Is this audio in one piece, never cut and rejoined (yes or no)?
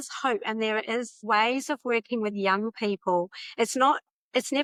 yes